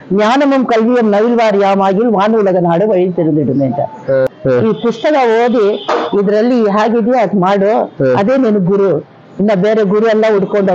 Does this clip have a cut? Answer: yes; 1 cut; at 4.4 s

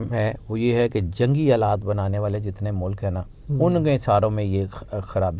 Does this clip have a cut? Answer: no; 0 cuts

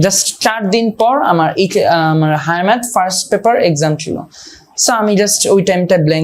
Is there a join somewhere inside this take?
no; 0 cuts

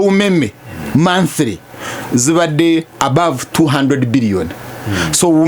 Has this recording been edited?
no; 0 cuts

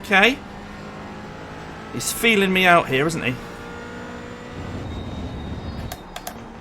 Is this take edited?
no; 0 cuts

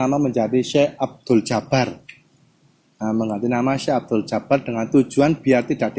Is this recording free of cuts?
yes; 0 cuts

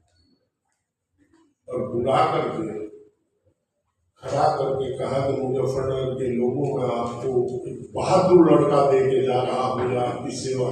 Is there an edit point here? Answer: no; 0 cuts

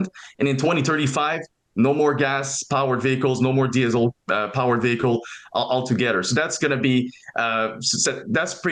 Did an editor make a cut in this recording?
no; 0 cuts

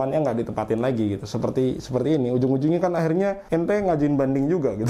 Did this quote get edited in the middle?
yes; 1 cut; at 3.4 s

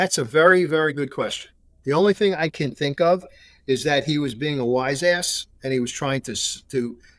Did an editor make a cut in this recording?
no; 0 cuts

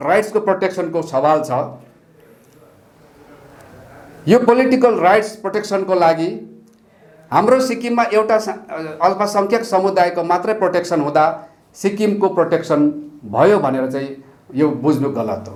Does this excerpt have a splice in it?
no; 0 cuts

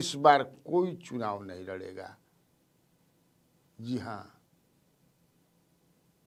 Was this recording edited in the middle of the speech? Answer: no; 0 cuts

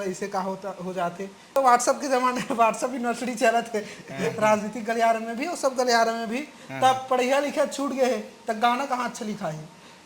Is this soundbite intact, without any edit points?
no; 1 cut; at 1.6 s

